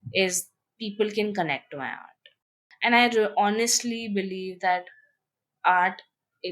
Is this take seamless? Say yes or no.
no